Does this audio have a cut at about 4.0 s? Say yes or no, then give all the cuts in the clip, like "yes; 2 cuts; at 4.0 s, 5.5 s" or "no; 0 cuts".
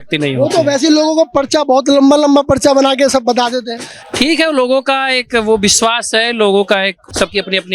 no; 0 cuts